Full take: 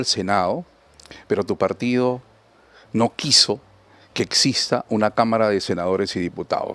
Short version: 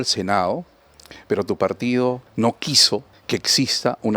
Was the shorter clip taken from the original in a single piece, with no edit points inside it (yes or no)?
no